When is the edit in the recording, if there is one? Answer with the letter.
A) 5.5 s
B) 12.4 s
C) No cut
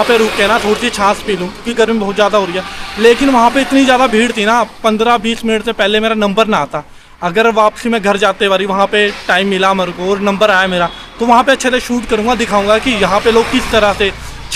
C